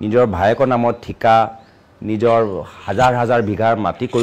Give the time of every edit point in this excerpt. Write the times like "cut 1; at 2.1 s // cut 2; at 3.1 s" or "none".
none